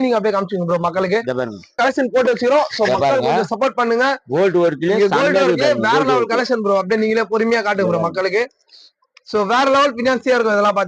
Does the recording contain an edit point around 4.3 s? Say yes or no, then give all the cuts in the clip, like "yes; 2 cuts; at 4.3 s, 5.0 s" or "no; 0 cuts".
no; 1 cut; at 1.8 s